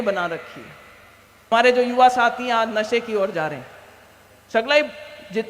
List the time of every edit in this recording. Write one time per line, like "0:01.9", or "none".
0:01.5